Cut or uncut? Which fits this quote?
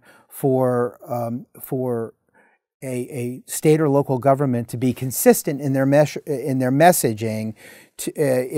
uncut